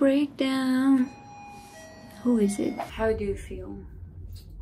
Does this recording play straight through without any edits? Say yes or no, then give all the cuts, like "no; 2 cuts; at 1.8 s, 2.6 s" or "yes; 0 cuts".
no; 1 cut; at 2.9 s